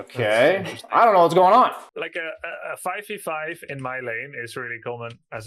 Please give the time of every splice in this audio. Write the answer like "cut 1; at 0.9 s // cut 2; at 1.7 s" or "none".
cut 1; at 1.8 s